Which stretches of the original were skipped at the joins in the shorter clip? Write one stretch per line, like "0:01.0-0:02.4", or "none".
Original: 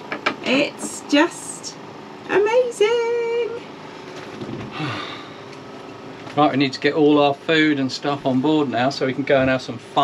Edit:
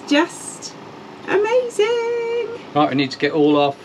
0:03.6-0:06.2